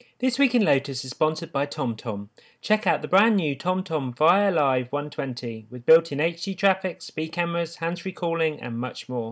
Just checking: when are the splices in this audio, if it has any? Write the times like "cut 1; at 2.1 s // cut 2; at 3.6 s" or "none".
none

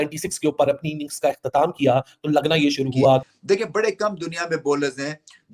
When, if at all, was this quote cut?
cut 1; at 3.3 s

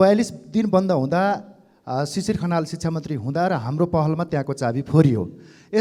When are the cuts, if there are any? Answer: none

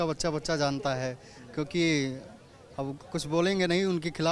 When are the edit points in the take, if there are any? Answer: none

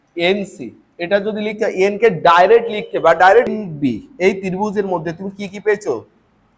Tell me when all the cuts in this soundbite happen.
cut 1; at 3.5 s

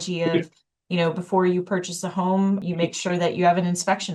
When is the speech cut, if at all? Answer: cut 1; at 2.6 s

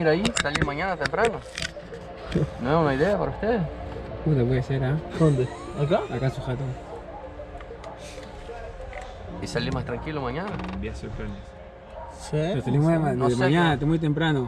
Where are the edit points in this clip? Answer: none

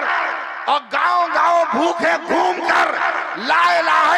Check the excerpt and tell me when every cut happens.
none

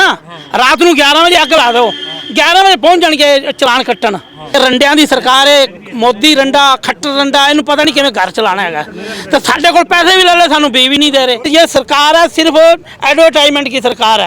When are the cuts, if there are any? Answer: cut 1; at 4.5 s // cut 2; at 11.5 s

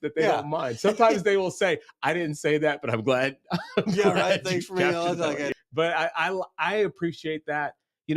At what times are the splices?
cut 1; at 5.5 s

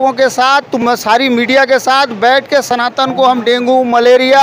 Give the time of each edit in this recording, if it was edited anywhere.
none

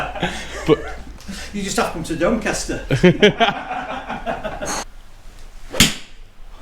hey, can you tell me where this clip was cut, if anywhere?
cut 1; at 4.9 s

